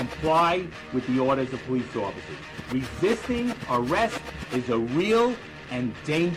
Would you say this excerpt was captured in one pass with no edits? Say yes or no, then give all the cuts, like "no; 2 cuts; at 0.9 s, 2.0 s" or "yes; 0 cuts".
yes; 0 cuts